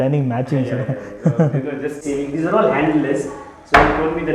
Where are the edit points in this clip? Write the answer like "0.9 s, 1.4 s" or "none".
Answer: 2.0 s